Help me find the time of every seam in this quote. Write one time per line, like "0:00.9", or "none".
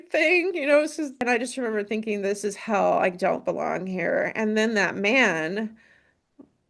0:01.2